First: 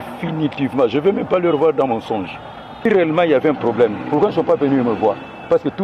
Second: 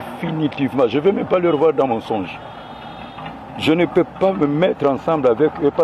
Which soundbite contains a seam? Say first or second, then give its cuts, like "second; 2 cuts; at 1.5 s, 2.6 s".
first; 1 cut; at 2.9 s